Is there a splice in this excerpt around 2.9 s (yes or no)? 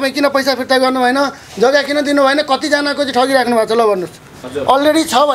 no